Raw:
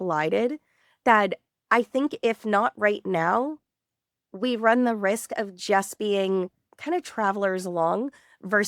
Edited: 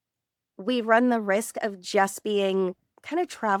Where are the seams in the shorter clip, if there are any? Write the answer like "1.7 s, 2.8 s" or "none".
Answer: none

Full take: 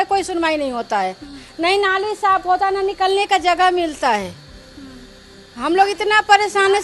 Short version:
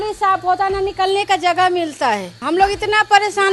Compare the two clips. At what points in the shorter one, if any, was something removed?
2.3 s

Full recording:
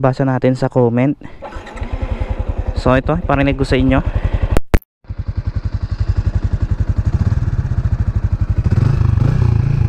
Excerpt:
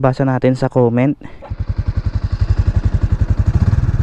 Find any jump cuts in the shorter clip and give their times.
1.4 s

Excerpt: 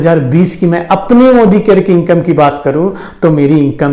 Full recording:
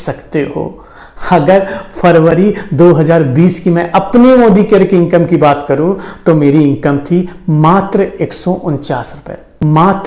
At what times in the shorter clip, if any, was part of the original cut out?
none

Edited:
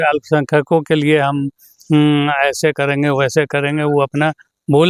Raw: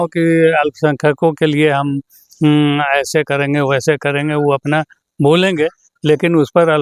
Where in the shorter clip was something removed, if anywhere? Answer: none

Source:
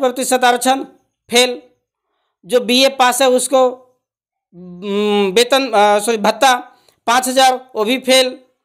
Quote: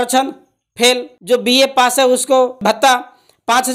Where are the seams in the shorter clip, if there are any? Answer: 1.1 s, 2.6 s

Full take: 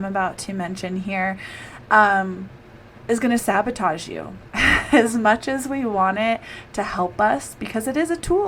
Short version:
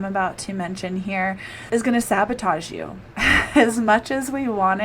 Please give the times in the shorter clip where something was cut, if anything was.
1.5 s

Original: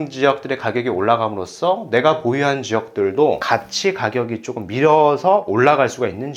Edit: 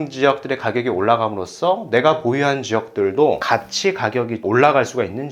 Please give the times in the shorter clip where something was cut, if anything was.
4.4 s

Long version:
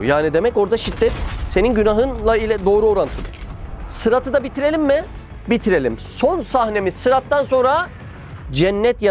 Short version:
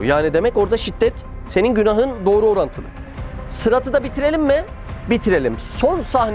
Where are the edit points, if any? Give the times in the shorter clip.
2.2 s

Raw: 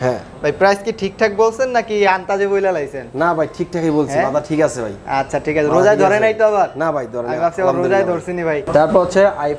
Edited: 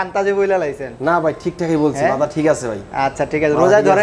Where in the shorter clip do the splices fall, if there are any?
none

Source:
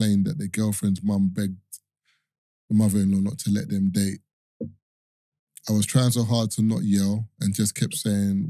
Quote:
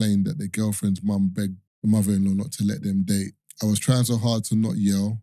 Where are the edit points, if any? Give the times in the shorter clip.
1.7 s, 3.4 s

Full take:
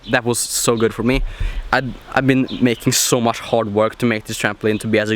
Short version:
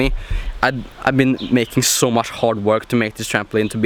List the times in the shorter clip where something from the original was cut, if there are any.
none

